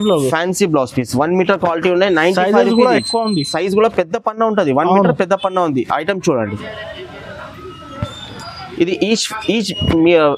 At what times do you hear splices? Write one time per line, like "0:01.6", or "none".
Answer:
none